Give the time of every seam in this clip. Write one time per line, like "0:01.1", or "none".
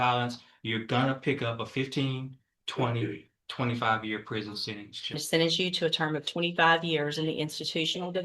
0:05.2